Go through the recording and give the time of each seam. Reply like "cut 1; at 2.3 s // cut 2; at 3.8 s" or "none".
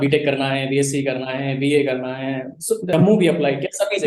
cut 1; at 2.9 s